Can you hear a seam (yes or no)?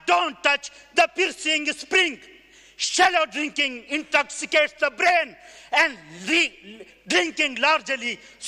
no